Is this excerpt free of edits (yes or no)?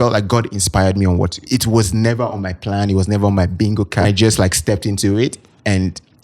no